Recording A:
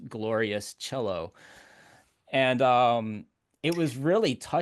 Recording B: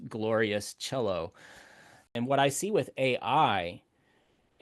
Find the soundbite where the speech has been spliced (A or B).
B